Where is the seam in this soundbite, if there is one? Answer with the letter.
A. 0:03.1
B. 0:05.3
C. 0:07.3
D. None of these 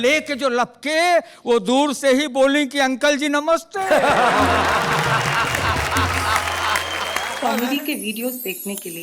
C